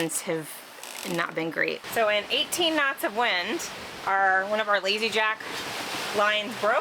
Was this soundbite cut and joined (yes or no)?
yes